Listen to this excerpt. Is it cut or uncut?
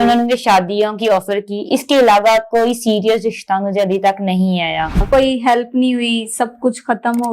cut